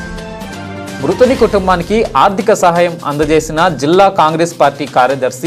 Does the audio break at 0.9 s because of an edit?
yes; 1 cut; at 0.9 s

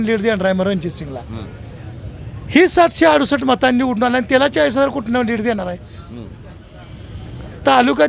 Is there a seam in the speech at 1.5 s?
no; 0 cuts

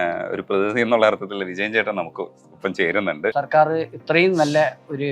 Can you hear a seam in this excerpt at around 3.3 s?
yes; 1 cut; at 3.3 s

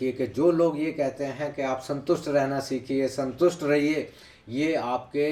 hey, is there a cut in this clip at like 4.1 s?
no; 0 cuts

